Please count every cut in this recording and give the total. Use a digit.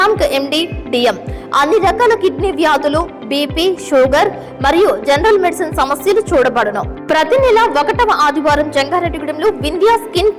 0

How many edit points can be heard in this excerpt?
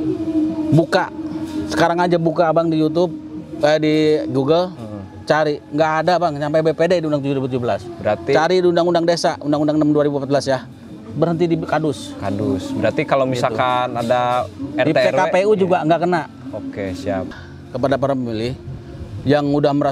1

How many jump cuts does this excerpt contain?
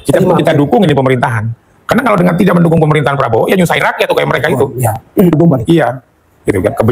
1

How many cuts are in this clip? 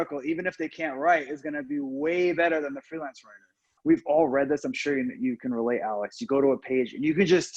1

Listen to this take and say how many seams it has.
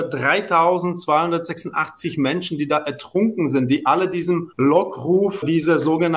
2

